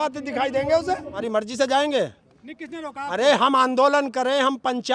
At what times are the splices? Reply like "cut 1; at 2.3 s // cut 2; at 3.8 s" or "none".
none